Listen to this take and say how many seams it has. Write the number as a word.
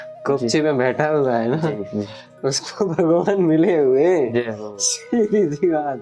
zero